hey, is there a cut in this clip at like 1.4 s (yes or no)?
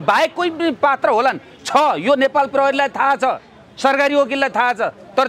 no